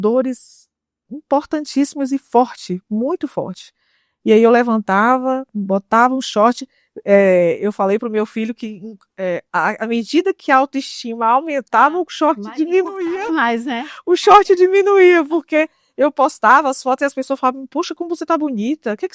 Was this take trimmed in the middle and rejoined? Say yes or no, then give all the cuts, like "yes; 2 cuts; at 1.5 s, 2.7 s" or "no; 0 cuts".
no; 0 cuts